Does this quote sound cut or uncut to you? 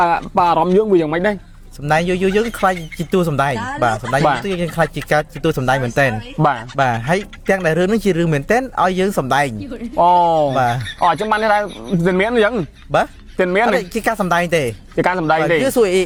uncut